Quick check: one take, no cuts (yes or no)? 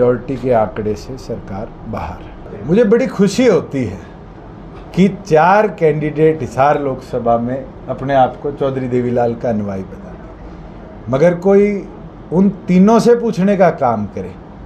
no